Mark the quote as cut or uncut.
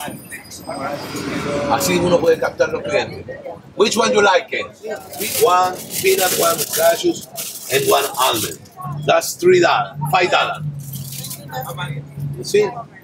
cut